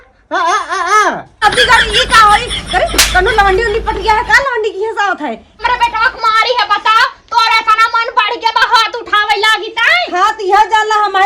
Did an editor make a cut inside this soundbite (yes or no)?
yes